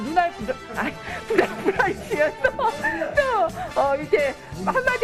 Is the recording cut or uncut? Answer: uncut